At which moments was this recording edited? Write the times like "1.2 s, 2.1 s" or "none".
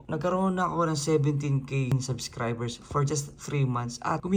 none